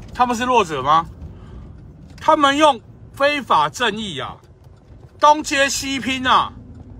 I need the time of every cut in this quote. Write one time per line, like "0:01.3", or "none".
none